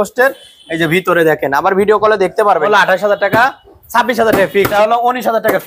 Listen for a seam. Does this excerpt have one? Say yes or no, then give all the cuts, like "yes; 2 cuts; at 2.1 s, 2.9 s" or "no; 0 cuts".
yes; 2 cuts; at 2.6 s, 4.7 s